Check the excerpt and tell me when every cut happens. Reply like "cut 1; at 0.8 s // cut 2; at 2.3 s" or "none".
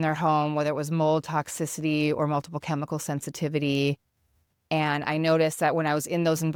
none

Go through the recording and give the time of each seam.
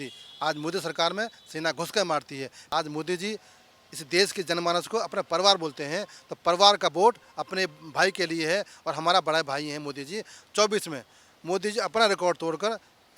cut 1; at 2.5 s

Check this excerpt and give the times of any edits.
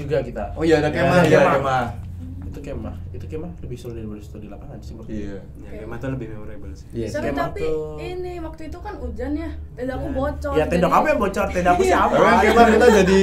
none

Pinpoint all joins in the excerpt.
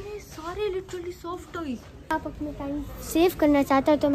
cut 1; at 2.1 s

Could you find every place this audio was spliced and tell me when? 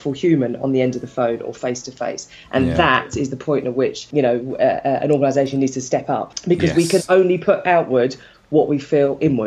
cut 1; at 4.1 s // cut 2; at 6.3 s

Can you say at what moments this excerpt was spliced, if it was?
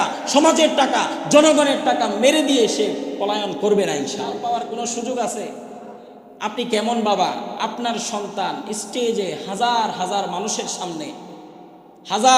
cut 1; at 4.4 s

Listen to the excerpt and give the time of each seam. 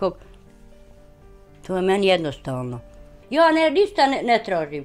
cut 1; at 3.2 s

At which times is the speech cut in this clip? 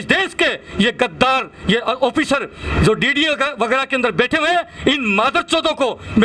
none

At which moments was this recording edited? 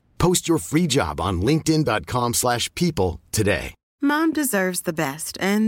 cut 1; at 3.8 s

